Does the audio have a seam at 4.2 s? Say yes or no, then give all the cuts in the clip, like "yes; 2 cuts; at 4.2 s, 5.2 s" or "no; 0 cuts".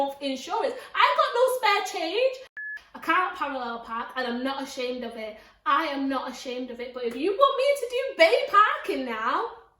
no; 1 cut; at 2.6 s